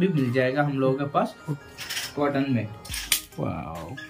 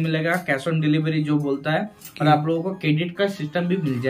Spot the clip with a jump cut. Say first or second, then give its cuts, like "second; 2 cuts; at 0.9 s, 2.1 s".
first; 1 cut; at 1.5 s